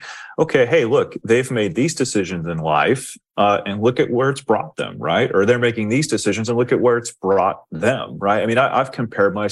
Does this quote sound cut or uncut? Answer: uncut